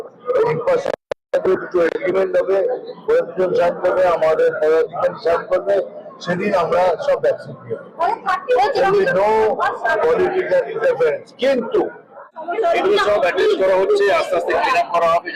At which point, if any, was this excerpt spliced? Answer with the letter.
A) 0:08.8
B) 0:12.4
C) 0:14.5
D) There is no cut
B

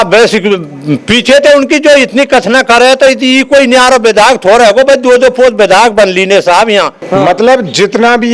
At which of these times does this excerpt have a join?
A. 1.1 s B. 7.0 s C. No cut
B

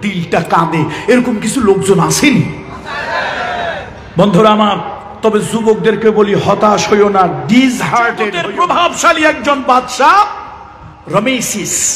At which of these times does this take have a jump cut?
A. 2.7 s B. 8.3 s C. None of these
B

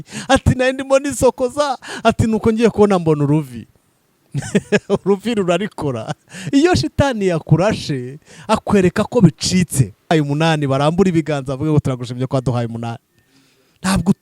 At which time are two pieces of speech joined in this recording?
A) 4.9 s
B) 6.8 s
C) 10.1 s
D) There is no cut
C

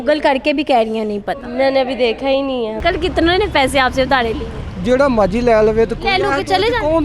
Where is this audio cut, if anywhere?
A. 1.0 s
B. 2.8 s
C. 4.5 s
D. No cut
B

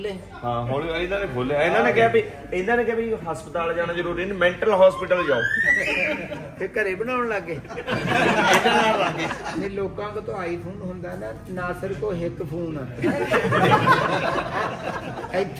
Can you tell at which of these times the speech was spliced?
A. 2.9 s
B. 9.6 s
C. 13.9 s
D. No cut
B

